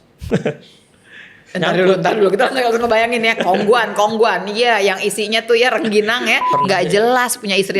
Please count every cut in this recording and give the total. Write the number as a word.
one